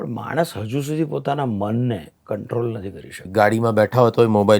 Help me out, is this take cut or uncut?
cut